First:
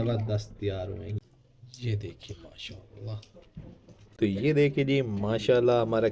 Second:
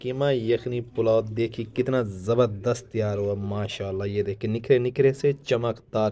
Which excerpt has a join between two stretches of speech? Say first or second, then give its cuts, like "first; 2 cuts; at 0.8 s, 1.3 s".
first; 2 cuts; at 1.2 s, 4.0 s